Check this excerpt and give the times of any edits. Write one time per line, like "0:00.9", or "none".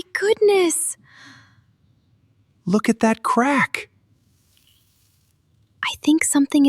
none